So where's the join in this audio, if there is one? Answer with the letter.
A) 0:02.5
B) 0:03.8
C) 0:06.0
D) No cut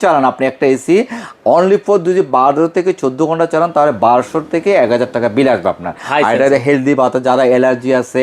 C